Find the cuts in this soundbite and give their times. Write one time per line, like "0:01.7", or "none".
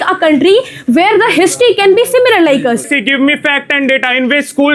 0:02.9